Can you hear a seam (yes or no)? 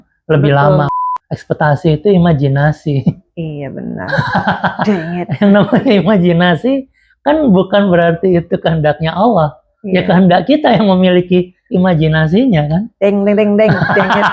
yes